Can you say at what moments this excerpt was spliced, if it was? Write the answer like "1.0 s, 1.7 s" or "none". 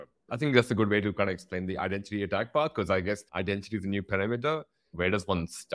3.3 s, 4.9 s